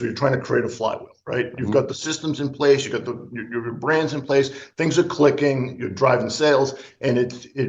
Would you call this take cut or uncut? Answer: uncut